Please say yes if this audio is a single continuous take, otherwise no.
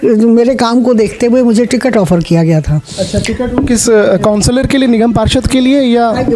yes